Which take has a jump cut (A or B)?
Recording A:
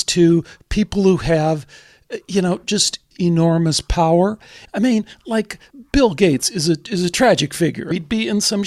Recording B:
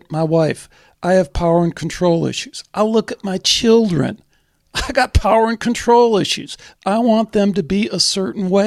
A